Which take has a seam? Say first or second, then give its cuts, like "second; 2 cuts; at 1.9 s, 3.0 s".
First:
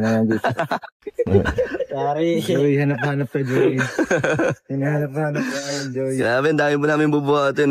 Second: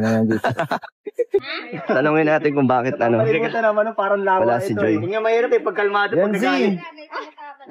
second; 1 cut; at 1.4 s